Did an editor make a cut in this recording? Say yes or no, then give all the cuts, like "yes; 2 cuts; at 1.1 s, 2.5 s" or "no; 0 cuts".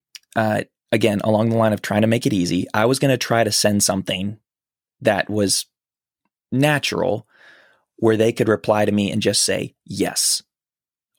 no; 0 cuts